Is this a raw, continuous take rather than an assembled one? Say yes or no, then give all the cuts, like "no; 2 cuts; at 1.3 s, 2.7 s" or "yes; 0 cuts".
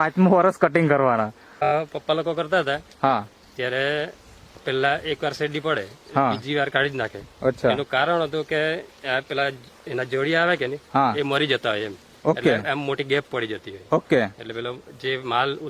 no; 1 cut; at 1.7 s